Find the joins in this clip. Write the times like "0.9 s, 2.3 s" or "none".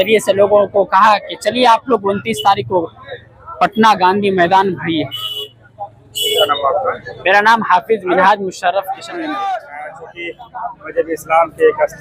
none